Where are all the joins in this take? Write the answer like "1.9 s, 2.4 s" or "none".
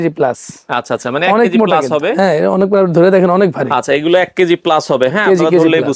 none